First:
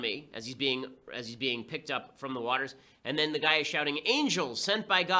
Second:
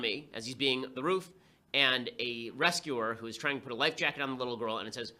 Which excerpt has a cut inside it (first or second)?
first